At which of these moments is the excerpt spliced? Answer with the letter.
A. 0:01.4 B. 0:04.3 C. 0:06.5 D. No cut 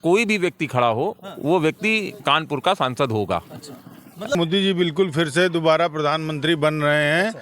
B